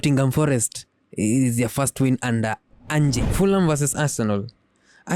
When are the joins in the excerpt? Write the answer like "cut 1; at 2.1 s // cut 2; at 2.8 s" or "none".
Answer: cut 1; at 3.3 s